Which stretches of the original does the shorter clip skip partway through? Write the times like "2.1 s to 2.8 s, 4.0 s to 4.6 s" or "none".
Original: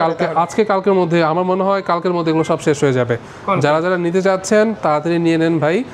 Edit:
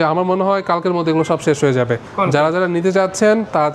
3.3 s to 3.4 s